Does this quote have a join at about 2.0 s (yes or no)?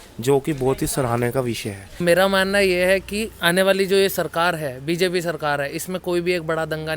yes